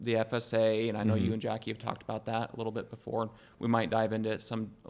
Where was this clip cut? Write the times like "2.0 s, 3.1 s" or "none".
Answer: none